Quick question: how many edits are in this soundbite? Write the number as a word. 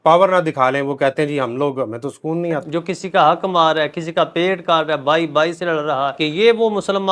two